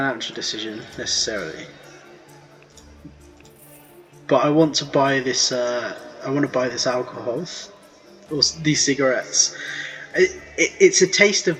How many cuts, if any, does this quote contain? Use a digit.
0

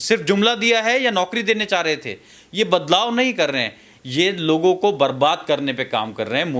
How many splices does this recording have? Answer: 0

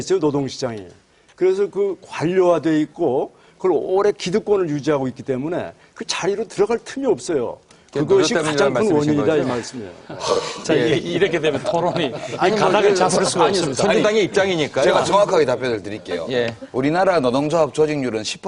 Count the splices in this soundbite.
1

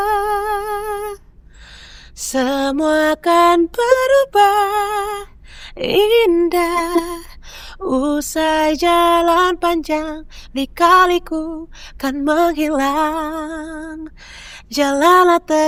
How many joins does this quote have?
0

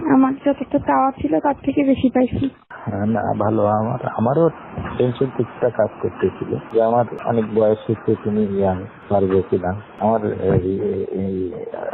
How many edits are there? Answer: 0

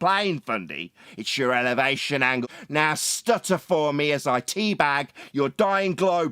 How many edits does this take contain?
1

